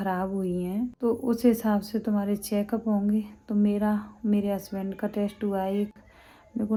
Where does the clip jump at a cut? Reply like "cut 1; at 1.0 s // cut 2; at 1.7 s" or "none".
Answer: none